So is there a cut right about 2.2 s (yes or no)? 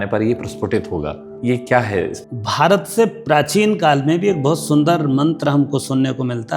yes